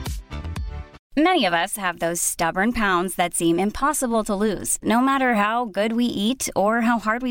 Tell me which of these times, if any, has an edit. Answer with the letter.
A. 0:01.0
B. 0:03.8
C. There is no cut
A